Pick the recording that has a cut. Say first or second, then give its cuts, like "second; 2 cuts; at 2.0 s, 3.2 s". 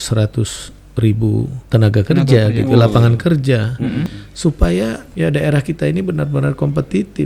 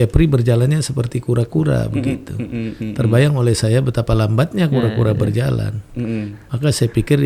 first; 3 cuts; at 1.6 s, 4.2 s, 5.0 s